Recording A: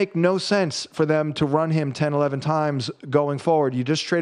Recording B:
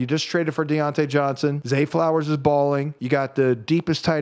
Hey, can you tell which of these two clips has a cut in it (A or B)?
B